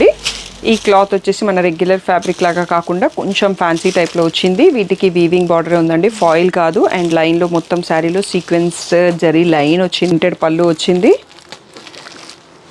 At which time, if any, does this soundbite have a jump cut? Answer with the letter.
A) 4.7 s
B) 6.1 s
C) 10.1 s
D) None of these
C